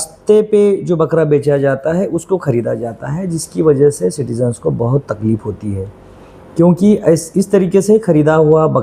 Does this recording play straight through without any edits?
yes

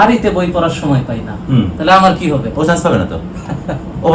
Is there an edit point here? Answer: no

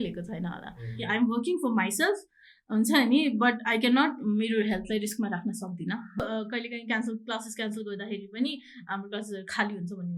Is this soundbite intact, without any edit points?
no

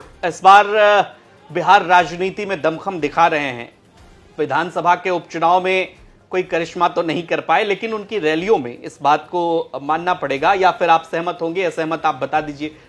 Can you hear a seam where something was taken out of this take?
no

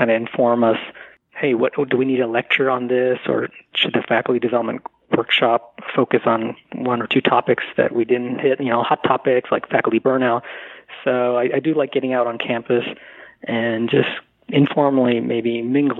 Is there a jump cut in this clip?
no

